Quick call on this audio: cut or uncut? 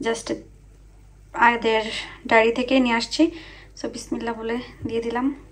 uncut